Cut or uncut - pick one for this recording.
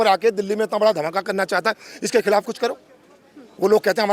uncut